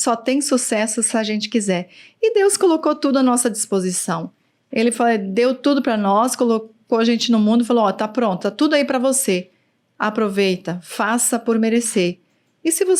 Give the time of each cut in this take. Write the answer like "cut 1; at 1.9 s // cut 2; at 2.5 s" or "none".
none